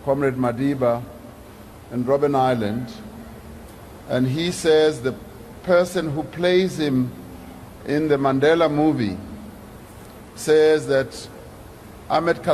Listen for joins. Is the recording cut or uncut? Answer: uncut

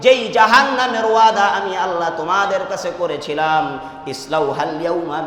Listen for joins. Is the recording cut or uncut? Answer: uncut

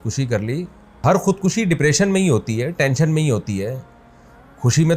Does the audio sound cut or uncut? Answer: cut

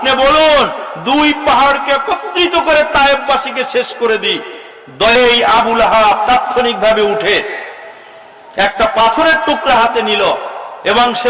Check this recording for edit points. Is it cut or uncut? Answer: cut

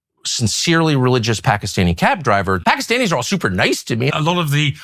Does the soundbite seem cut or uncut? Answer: cut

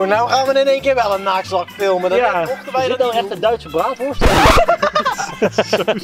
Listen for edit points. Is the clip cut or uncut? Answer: uncut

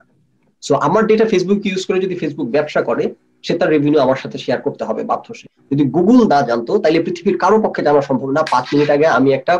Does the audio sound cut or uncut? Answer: cut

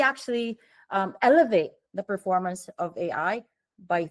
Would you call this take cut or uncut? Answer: uncut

